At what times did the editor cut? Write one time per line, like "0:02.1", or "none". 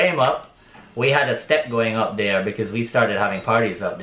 none